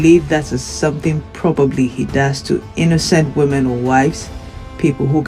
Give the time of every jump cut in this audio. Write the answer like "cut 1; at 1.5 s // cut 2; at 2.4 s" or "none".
none